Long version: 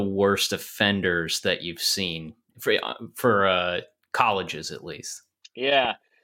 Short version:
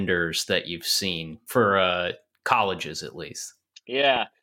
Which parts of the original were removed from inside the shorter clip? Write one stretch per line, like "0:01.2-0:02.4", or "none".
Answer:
0:02.3-0:03.1